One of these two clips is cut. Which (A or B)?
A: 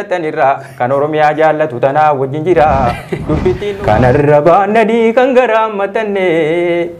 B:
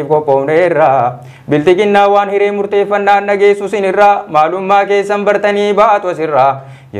A